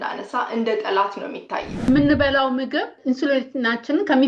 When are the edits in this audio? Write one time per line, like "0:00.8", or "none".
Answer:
0:01.7
0:02.9